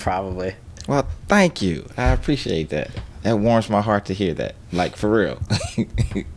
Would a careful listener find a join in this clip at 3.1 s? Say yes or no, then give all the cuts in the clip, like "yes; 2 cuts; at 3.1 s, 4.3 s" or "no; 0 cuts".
yes; 1 cut; at 3.1 s